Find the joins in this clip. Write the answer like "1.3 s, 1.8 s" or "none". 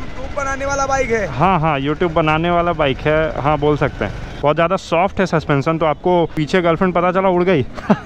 4.4 s, 6.4 s

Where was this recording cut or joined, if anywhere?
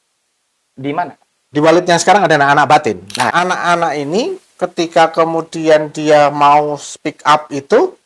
3.3 s

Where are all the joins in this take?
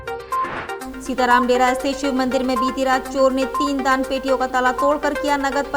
0.9 s

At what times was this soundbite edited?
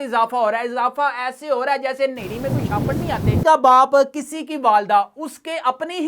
3.4 s

